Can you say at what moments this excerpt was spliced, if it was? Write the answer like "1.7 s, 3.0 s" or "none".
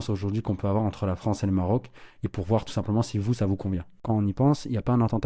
4.0 s

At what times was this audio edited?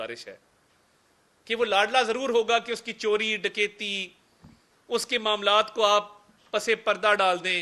none

